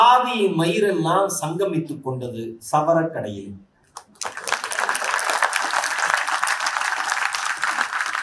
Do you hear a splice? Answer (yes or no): no